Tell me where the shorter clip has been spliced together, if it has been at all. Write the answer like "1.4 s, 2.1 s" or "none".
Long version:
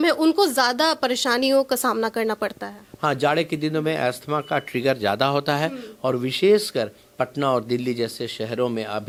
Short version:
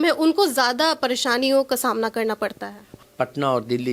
2.9 s